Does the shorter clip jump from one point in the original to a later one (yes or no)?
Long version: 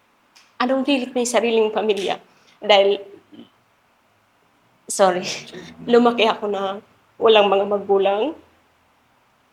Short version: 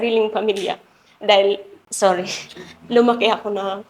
yes